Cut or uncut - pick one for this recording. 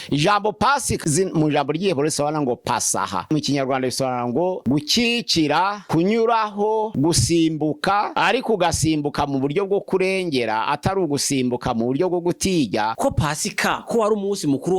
cut